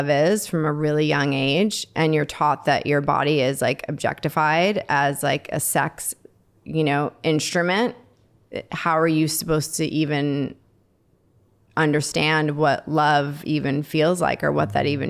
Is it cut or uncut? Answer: uncut